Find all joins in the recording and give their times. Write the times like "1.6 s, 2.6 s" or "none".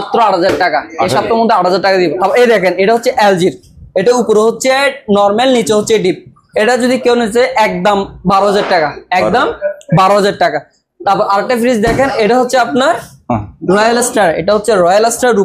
none